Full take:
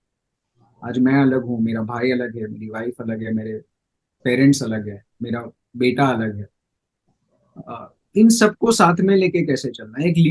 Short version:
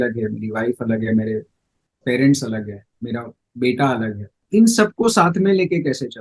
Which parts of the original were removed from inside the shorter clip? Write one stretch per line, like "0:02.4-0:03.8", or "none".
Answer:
0:06.5-0:07.9